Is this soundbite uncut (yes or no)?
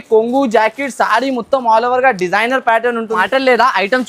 no